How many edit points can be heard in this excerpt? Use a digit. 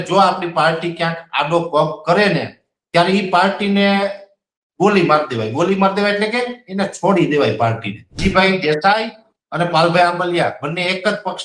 0